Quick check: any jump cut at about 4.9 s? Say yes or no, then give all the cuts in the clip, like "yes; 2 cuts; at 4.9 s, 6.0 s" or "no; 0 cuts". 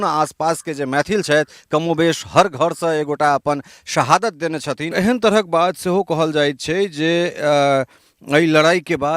yes; 1 cut; at 4.9 s